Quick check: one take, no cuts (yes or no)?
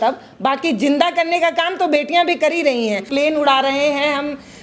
no